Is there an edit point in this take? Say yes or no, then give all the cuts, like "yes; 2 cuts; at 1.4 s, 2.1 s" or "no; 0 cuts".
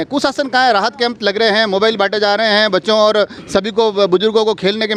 no; 0 cuts